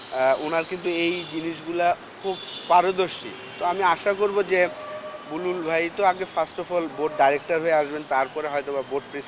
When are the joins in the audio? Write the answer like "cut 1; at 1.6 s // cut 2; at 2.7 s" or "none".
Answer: none